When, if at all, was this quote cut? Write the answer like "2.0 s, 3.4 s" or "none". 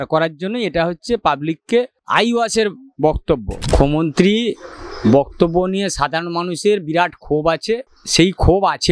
2.0 s, 3.5 s, 8.0 s